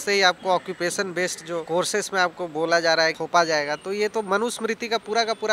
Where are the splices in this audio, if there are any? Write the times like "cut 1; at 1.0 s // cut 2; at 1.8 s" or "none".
cut 1; at 1.6 s // cut 2; at 3.2 s